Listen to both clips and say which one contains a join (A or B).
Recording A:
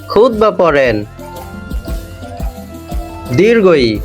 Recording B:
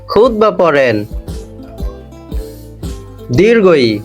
B